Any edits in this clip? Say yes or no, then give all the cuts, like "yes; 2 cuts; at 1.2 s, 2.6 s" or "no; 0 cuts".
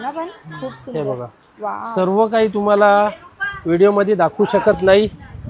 no; 0 cuts